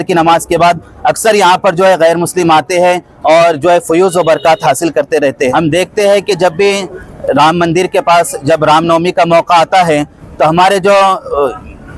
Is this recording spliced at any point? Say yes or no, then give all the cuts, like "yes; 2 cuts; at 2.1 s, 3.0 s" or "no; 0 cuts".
yes; 1 cut; at 5.5 s